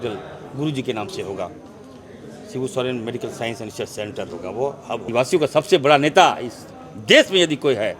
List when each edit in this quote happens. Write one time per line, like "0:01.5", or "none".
0:05.1